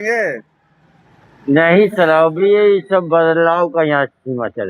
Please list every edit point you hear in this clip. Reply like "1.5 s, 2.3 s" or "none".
none